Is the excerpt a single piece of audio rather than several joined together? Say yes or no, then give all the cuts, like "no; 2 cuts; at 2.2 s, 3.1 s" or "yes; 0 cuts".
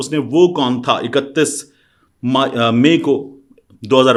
yes; 0 cuts